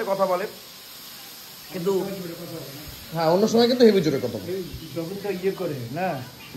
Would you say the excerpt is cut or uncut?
uncut